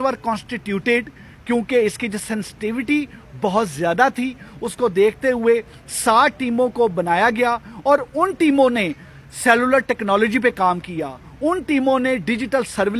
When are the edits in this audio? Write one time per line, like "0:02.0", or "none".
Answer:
none